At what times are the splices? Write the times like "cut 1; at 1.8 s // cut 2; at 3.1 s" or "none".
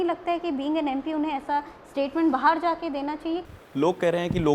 cut 1; at 3.5 s